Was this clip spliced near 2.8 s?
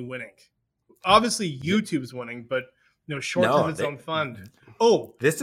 no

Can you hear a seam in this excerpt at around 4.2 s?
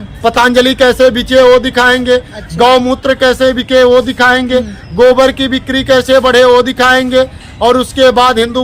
no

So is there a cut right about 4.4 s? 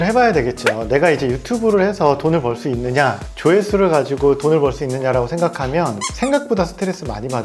no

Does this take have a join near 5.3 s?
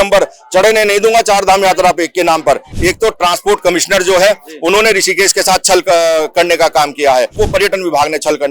no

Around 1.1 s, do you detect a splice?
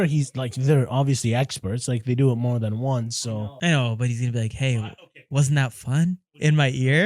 no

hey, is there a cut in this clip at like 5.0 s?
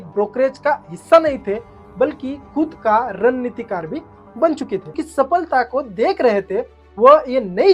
yes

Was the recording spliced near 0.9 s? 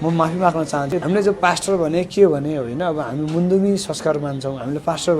yes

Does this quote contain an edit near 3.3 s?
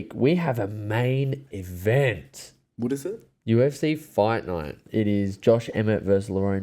no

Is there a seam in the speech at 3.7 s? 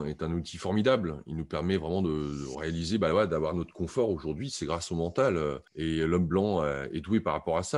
no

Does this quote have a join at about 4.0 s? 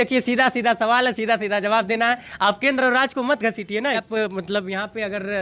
yes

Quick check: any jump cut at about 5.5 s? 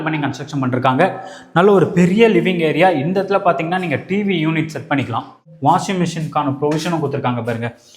yes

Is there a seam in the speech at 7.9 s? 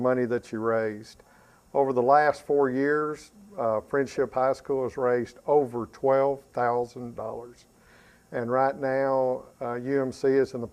no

